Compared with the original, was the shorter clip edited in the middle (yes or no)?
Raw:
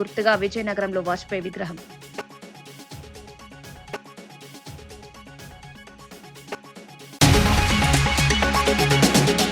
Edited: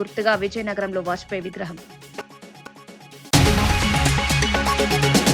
yes